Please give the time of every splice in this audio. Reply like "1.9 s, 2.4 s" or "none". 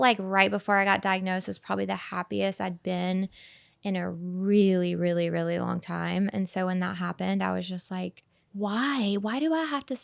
8.4 s